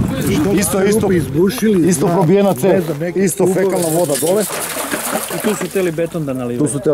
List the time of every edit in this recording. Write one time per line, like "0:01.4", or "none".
none